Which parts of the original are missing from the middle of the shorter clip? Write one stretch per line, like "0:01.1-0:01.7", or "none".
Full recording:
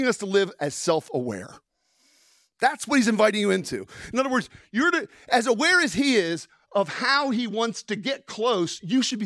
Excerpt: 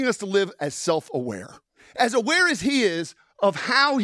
0:01.8-0:05.1